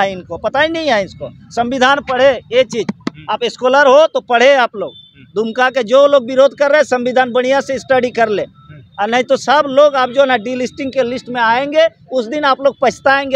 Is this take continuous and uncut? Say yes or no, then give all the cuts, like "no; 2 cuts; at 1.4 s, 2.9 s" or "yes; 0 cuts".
yes; 0 cuts